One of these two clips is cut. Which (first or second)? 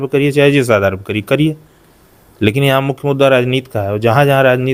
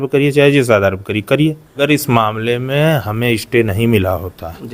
second